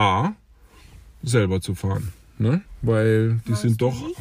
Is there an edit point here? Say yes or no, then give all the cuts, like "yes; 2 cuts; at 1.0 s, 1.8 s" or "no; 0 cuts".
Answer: yes; 1 cut; at 2.7 s